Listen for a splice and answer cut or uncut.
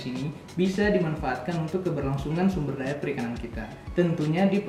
uncut